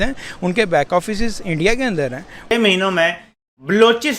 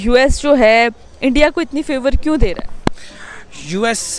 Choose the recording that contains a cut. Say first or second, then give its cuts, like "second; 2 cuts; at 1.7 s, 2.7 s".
first; 1 cut; at 2.5 s